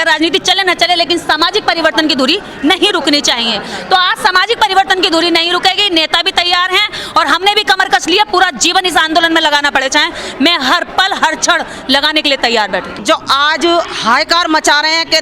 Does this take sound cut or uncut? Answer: cut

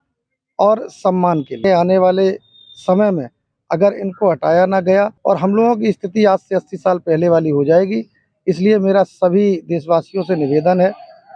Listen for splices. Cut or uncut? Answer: cut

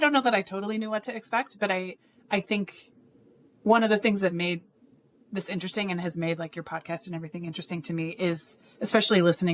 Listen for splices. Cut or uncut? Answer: uncut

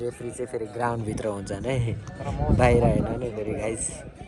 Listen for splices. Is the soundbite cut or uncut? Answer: uncut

